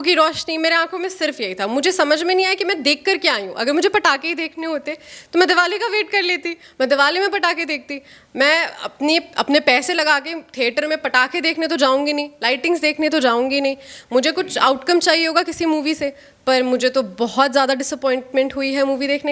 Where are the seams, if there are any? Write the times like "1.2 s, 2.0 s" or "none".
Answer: none